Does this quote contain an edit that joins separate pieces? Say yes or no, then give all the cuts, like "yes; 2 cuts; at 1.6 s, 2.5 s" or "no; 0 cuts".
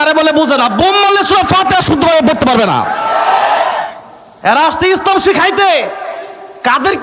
no; 0 cuts